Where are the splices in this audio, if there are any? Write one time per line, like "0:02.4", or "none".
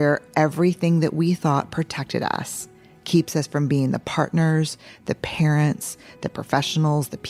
none